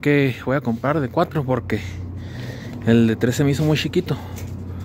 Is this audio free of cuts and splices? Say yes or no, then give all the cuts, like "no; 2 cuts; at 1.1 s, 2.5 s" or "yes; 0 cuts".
yes; 0 cuts